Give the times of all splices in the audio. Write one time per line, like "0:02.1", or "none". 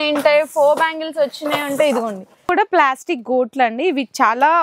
0:02.4